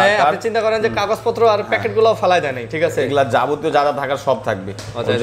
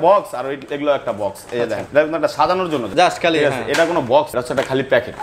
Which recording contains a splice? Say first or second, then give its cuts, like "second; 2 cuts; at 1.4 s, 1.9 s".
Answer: second; 3 cuts; at 1.8 s, 2.9 s, 4.3 s